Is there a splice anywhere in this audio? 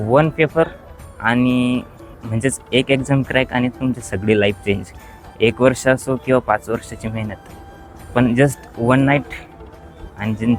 no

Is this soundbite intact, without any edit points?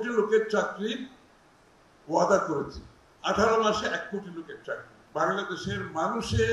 no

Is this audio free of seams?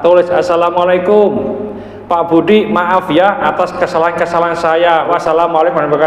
no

